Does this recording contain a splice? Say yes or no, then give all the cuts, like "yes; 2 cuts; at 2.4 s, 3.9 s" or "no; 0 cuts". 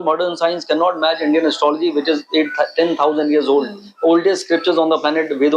no; 0 cuts